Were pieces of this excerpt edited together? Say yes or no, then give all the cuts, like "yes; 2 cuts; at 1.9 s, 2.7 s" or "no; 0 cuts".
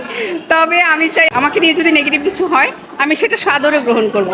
yes; 1 cut; at 1.3 s